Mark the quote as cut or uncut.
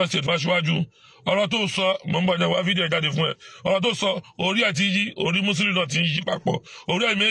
uncut